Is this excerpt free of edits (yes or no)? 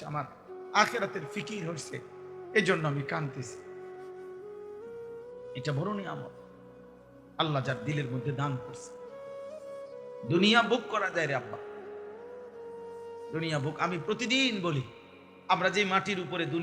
no